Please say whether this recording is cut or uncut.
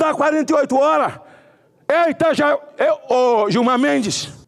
uncut